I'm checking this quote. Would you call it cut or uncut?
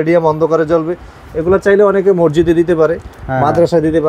uncut